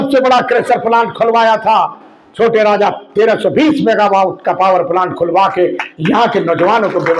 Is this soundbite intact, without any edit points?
yes; 0 cuts

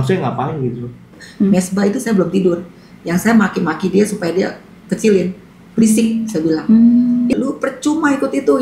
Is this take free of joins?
no; 2 cuts; at 1.2 s, 7.3 s

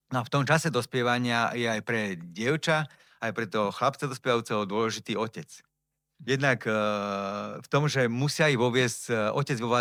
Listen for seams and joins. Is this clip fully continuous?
yes; 0 cuts

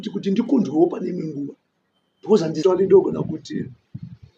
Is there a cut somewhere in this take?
yes; 1 cut; at 2.6 s

